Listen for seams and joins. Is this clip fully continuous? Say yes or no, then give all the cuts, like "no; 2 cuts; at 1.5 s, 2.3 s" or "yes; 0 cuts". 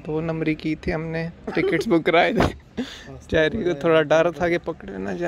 yes; 0 cuts